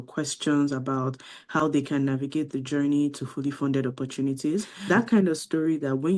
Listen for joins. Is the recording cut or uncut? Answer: cut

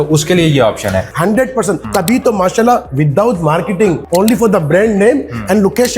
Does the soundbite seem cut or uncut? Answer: cut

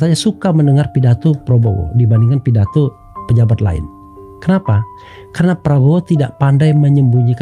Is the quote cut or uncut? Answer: uncut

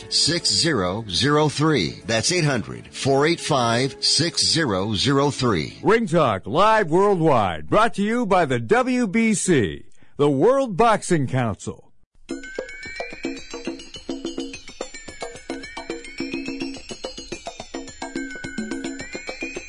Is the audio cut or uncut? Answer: uncut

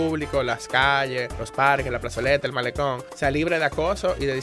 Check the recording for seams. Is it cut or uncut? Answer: cut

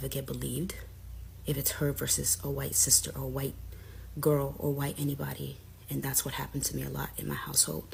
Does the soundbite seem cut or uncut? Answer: uncut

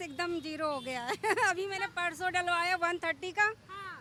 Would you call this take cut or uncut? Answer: uncut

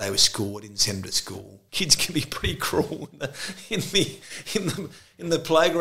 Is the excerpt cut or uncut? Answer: cut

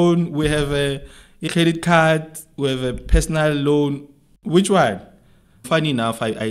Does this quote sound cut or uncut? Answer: cut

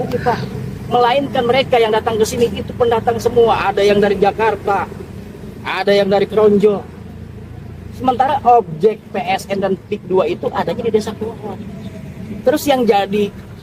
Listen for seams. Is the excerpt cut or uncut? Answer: uncut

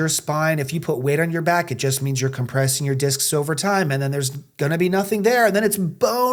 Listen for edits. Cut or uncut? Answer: uncut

